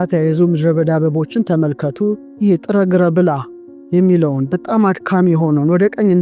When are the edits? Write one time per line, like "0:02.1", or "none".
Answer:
0:02.3